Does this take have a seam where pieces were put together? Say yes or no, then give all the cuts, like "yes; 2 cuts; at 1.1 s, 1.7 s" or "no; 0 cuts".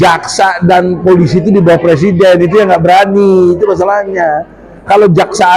no; 0 cuts